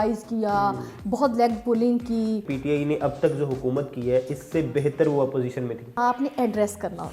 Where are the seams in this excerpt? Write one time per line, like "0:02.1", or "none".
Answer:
0:02.5
0:05.9

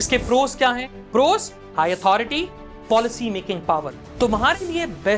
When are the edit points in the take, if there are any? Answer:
0:04.0

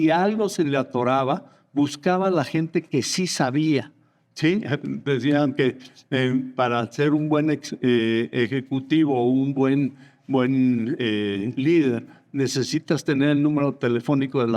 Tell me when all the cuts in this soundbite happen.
none

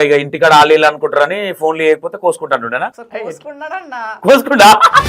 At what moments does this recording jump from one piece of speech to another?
0:03.0
0:04.2

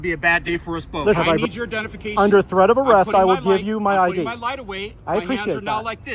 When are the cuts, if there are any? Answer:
0:01.2

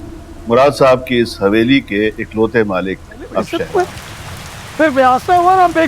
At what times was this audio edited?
0:03.5

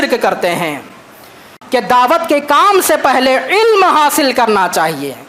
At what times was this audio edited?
0:01.6

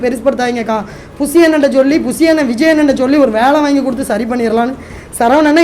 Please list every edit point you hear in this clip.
none

